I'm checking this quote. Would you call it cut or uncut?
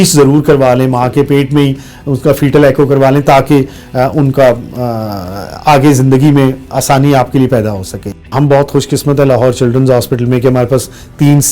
cut